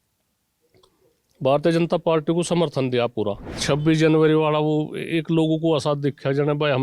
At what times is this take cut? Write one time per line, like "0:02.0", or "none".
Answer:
0:03.5